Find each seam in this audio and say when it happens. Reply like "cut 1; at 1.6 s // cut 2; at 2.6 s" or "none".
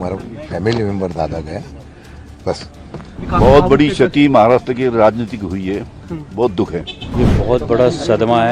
cut 1; at 3.2 s // cut 2; at 7.0 s